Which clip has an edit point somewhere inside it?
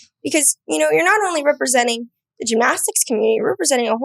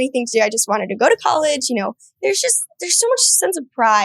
second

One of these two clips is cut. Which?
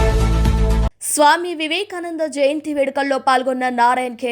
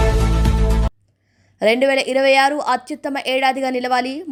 first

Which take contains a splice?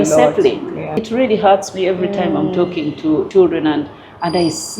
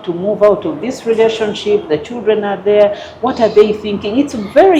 first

